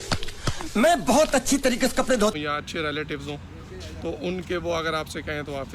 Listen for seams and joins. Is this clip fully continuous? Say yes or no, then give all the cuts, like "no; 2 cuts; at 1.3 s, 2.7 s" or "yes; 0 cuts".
no; 1 cut; at 2.3 s